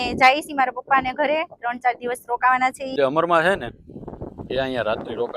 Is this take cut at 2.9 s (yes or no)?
yes